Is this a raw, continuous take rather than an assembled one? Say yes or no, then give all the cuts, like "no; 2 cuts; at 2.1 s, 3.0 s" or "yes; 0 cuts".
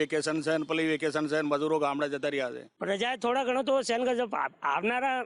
no; 1 cut; at 2.7 s